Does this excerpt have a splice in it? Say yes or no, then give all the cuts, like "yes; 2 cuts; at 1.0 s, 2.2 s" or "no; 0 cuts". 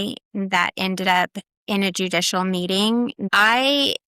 yes; 1 cut; at 3.2 s